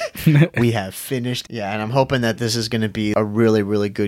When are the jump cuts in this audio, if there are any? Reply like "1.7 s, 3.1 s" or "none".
1.4 s, 3.1 s